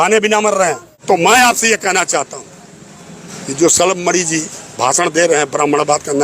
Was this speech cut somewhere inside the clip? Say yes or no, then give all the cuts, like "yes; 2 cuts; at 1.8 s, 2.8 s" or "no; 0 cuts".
yes; 1 cut; at 0.9 s